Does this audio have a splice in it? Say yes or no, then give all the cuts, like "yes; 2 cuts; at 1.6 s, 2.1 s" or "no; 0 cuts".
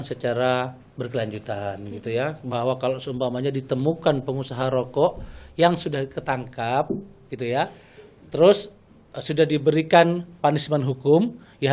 no; 0 cuts